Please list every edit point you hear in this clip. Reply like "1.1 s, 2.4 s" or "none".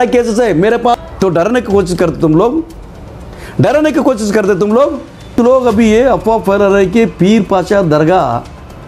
1.1 s, 5.3 s